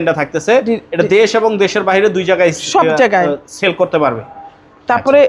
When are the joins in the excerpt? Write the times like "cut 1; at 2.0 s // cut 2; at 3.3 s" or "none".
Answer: none